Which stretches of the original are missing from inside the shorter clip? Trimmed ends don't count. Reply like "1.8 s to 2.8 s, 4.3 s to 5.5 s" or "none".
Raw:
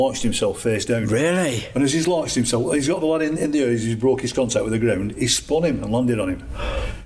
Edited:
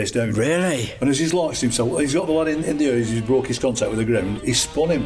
none